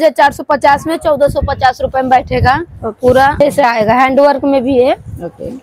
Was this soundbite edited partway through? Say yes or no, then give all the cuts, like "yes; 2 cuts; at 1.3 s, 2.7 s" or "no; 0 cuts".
yes; 1 cut; at 3.4 s